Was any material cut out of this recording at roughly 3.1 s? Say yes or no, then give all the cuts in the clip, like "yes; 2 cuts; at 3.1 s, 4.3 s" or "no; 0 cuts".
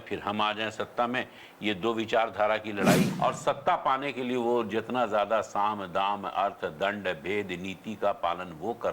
yes; 1 cut; at 3.1 s